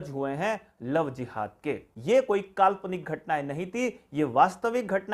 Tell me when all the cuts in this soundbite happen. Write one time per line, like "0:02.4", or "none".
0:01.9

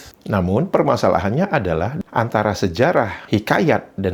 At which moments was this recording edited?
none

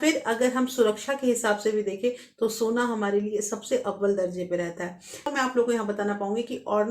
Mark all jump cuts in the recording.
0:05.3

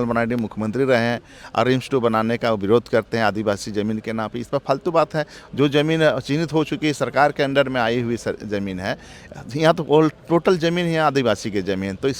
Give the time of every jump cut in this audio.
none

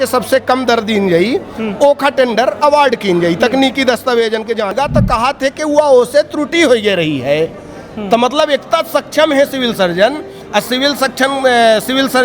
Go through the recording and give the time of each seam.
0:04.8

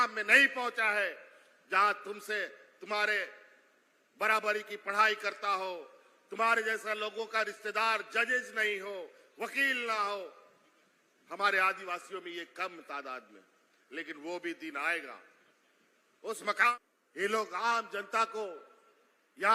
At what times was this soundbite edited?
0:16.7

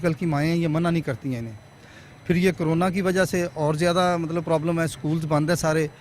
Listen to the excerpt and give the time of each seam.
none

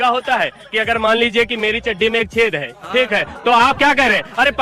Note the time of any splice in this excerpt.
none

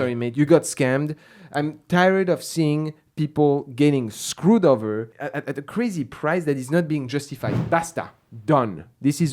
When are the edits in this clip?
0:05.2
0:07.5

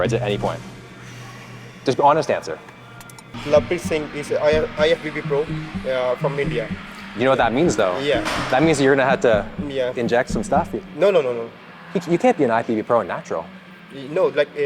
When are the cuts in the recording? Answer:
0:03.3

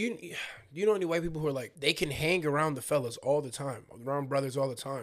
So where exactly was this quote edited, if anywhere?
0:01.7

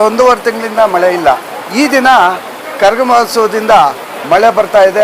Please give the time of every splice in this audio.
0:01.6
0:04.1

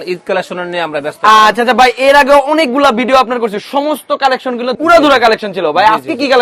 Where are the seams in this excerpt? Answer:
none

